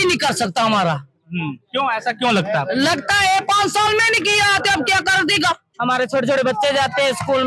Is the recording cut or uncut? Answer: cut